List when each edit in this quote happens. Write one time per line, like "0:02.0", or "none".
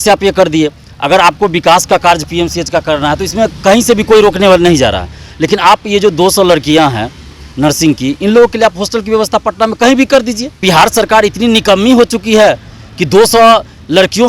0:10.6